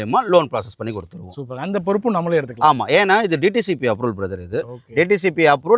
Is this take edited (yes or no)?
no